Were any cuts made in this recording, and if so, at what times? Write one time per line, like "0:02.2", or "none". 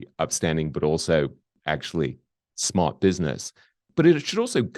0:01.5
0:03.9